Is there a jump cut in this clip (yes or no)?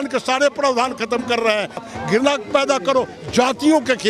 yes